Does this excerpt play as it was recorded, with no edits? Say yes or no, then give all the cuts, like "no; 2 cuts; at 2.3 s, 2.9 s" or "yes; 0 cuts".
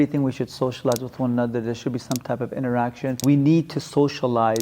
no; 1 cut; at 3.2 s